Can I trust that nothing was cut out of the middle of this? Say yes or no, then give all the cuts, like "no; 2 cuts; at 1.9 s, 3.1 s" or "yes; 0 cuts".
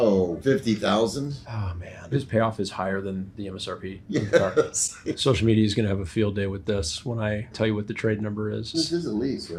yes; 0 cuts